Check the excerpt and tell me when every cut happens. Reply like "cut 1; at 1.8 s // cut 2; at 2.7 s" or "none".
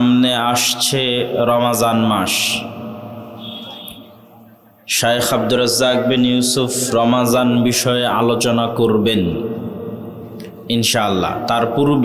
none